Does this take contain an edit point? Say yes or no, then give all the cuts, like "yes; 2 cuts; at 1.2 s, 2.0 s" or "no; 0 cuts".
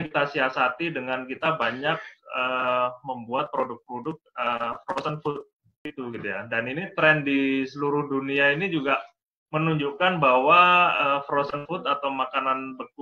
yes; 1 cut; at 5.9 s